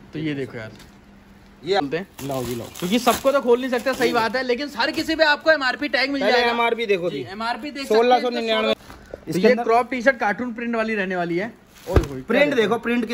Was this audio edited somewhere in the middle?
yes; 2 cuts; at 1.8 s, 8.8 s

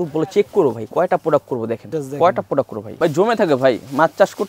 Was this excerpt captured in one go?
no; 2 cuts; at 1.9 s, 2.8 s

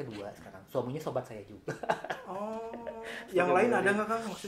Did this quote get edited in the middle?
no; 0 cuts

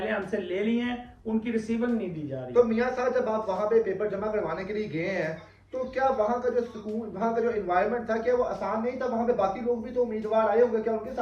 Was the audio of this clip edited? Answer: no; 0 cuts

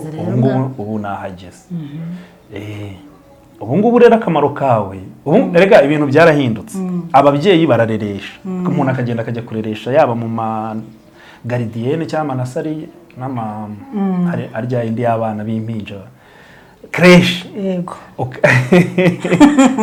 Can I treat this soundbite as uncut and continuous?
yes; 0 cuts

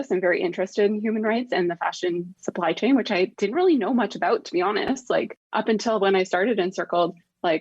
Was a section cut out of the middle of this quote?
yes; 1 cut; at 2.4 s

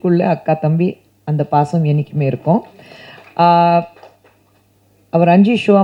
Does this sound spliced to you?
no; 0 cuts

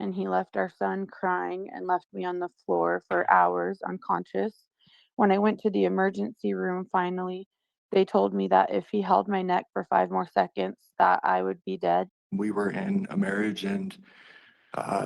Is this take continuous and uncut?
no; 1 cut; at 12.2 s

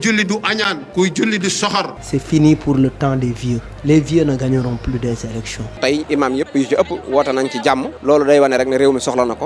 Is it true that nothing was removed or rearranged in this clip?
no; 2 cuts; at 1.9 s, 5.8 s

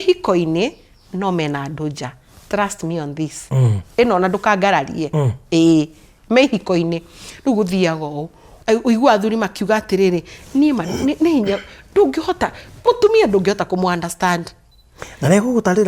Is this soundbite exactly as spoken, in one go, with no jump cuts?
no; 1 cut; at 8.5 s

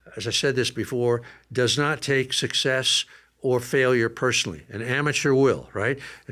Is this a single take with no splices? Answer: yes; 0 cuts

